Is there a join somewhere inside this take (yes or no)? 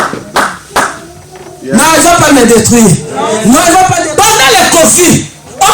yes